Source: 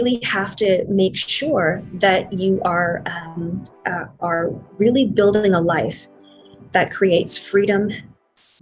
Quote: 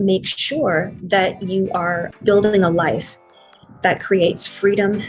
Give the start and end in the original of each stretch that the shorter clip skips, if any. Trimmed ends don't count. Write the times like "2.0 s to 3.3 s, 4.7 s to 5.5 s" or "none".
3.1 s to 5.1 s